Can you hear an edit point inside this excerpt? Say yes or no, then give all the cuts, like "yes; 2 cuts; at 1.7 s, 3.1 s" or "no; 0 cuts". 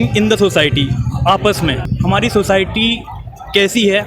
yes; 1 cut; at 1.9 s